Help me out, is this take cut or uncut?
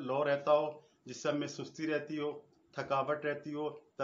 uncut